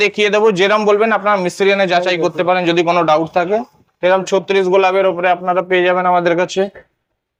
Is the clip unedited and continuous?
yes; 0 cuts

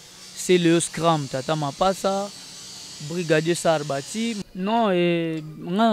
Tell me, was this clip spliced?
yes; 1 cut; at 4.4 s

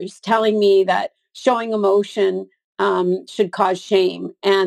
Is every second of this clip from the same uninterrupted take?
yes; 0 cuts

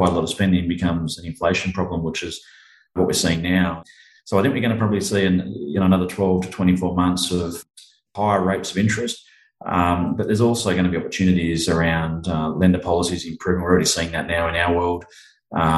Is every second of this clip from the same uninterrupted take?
no; 3 cuts; at 3.0 s, 3.8 s, 7.5 s

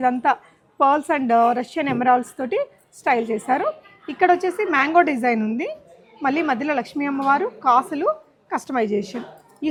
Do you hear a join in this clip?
no; 0 cuts

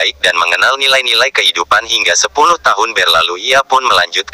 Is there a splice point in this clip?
no; 0 cuts

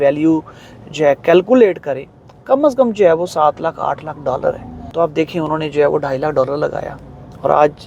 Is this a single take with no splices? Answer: no; 1 cut; at 4.8 s

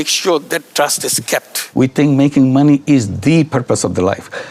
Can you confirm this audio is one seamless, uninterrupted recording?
no; 1 cut; at 1.6 s

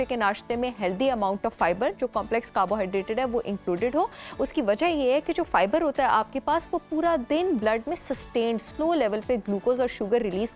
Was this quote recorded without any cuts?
yes; 0 cuts

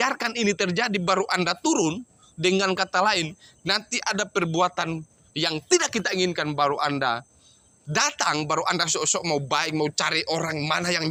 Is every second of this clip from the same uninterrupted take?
yes; 0 cuts

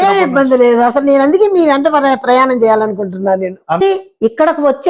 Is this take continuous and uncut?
no; 1 cut; at 3.8 s

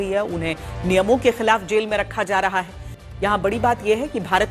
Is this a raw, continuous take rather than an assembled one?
yes; 0 cuts

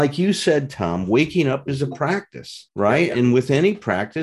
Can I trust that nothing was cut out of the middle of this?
yes; 0 cuts

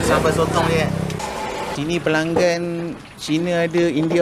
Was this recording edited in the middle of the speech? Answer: yes; 1 cut; at 1.2 s

